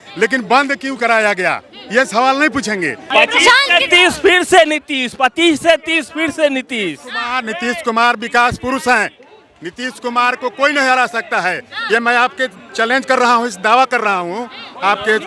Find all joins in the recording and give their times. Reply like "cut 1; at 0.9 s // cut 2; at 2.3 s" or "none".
cut 1; at 3.0 s